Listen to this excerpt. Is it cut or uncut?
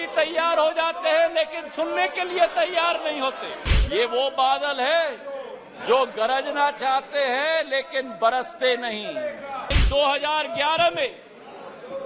cut